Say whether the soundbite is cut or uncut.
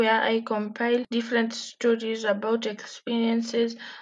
cut